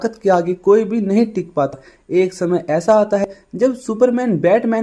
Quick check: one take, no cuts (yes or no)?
yes